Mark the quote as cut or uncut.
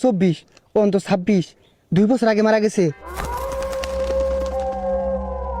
cut